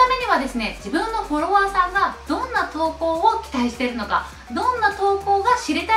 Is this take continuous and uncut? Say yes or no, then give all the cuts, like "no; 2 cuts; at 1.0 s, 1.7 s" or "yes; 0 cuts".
yes; 0 cuts